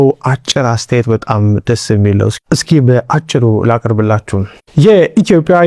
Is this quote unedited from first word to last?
yes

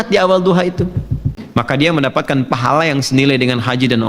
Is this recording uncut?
no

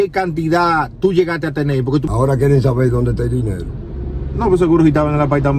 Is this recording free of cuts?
no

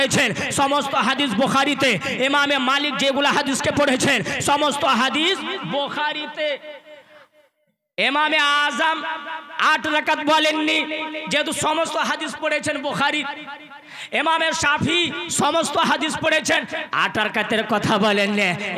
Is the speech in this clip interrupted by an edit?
no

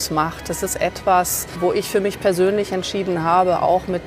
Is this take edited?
yes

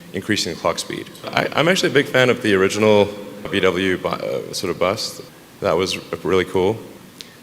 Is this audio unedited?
no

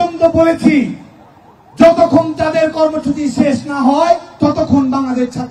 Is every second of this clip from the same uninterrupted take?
no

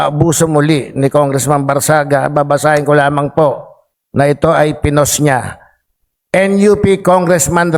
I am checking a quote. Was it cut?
no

